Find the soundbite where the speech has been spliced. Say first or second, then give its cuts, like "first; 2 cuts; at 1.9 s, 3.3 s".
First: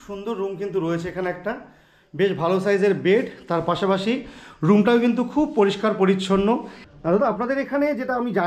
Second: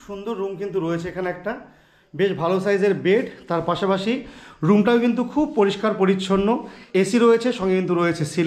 first; 1 cut; at 6.8 s